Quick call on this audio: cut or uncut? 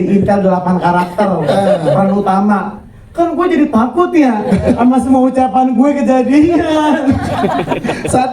uncut